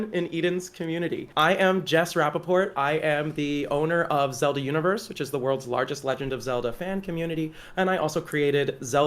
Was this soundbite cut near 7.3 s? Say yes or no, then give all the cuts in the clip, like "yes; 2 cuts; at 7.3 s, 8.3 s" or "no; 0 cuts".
no; 1 cut; at 1.3 s